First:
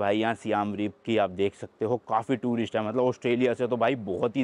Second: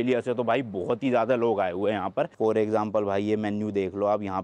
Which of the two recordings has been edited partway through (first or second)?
second